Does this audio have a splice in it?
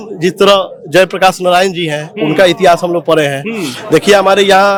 no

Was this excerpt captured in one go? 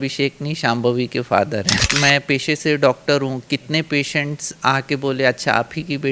no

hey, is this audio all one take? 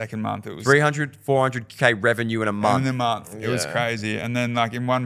yes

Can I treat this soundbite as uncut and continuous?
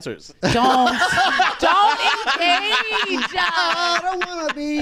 yes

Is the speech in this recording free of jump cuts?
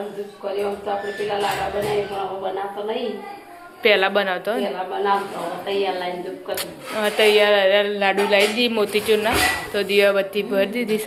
yes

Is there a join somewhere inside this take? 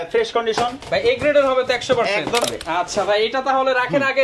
yes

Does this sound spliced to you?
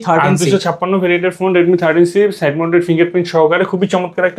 no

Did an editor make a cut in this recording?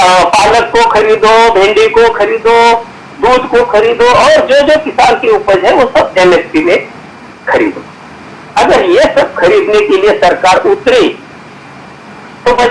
no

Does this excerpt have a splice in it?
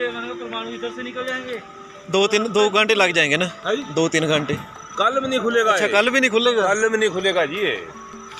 no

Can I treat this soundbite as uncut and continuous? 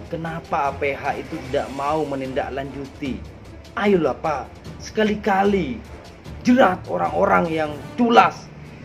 yes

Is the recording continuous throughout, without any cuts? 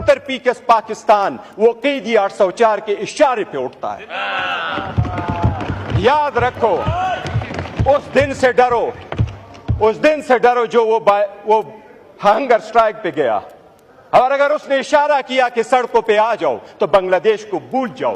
yes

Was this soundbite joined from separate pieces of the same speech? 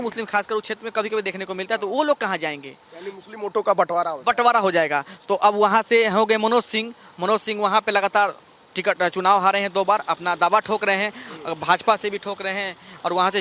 no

